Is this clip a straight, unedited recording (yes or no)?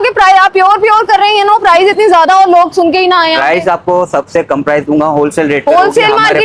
yes